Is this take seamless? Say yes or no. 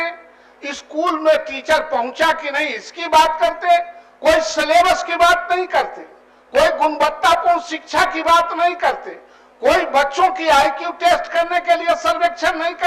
yes